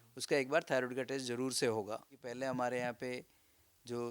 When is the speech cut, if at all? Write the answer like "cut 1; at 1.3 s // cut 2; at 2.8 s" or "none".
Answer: cut 1; at 2.4 s